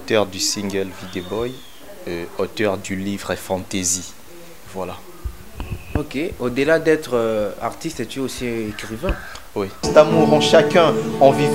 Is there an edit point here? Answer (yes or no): yes